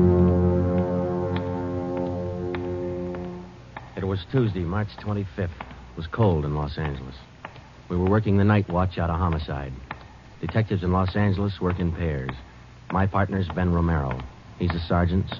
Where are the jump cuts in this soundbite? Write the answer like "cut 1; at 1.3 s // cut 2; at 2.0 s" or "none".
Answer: cut 1; at 6.1 s